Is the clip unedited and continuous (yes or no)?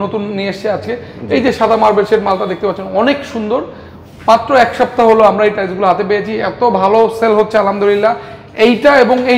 yes